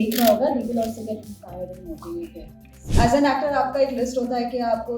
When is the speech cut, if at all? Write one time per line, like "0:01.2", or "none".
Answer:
0:02.8